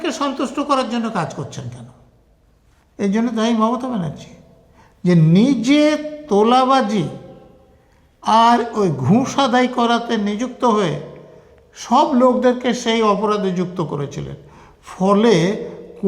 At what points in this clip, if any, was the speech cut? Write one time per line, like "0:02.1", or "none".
none